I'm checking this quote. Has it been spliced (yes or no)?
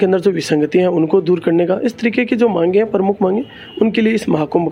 no